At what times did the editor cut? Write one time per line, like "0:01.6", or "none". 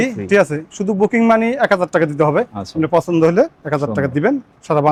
none